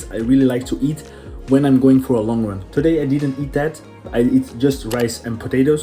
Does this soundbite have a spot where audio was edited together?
no; 0 cuts

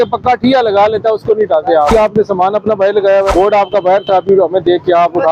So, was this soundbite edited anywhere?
yes; 2 cuts; at 1.9 s, 3.3 s

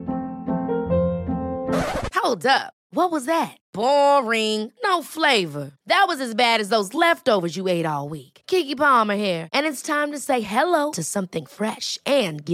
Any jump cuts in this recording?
no; 0 cuts

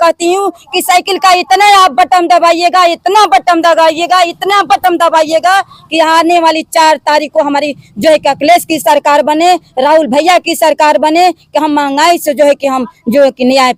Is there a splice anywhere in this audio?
no; 0 cuts

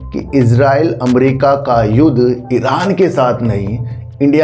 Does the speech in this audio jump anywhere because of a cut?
no; 0 cuts

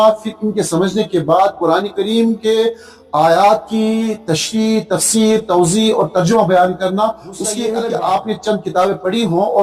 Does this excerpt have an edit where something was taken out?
yes; 1 cut; at 7.5 s

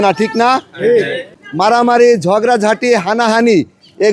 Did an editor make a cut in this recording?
yes; 1 cut; at 1.4 s

